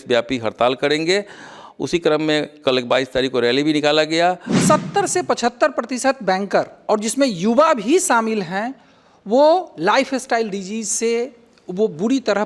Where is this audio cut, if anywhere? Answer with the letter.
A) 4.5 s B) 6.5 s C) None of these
A